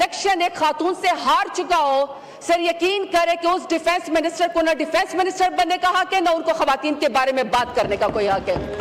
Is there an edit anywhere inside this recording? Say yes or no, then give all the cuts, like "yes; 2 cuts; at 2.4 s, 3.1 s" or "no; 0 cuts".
no; 0 cuts